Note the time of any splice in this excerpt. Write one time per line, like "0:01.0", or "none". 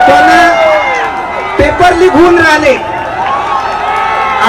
none